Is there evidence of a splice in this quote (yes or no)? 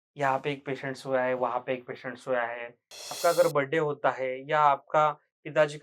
yes